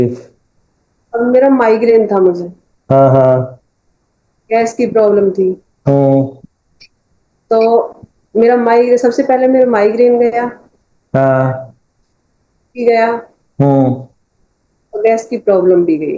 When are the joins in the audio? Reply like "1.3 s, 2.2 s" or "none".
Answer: none